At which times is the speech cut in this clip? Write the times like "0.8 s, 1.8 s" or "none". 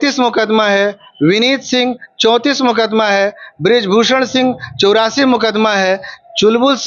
none